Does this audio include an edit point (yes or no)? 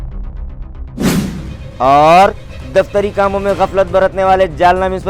yes